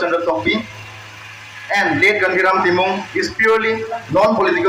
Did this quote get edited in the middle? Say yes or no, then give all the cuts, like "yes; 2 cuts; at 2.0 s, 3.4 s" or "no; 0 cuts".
no; 0 cuts